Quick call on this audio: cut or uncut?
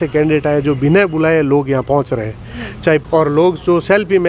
cut